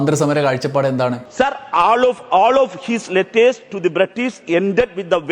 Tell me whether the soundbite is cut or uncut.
cut